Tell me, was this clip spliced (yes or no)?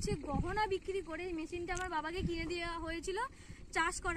no